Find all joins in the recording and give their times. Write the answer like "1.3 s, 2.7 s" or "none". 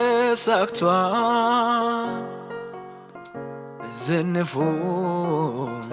none